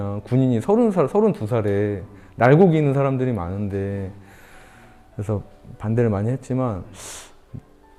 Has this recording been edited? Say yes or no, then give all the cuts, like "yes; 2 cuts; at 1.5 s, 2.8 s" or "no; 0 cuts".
no; 0 cuts